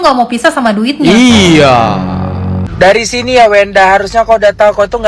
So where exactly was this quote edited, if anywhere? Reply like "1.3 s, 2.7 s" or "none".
2.6 s